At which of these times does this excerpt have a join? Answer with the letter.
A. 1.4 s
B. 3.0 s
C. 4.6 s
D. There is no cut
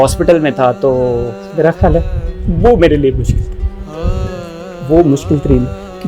A